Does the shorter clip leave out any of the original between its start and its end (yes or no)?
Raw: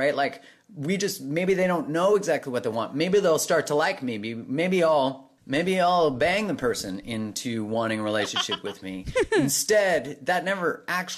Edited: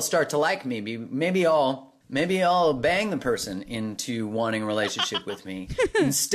no